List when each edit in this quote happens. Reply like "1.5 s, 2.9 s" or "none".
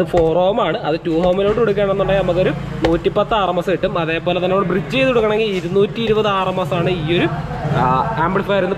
none